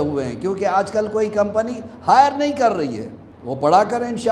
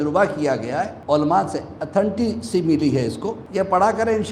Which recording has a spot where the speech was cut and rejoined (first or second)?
second